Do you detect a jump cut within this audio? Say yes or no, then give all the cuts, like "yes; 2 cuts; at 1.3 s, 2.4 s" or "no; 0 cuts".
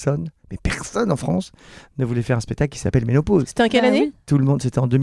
no; 0 cuts